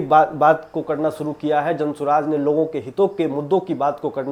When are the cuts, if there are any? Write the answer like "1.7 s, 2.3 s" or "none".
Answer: none